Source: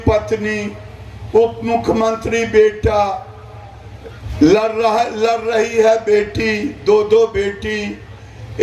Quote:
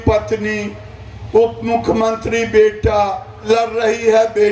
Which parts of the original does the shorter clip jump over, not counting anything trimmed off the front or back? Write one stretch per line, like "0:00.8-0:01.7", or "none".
0:03.4-0:05.1